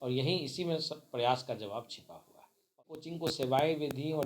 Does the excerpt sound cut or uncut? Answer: cut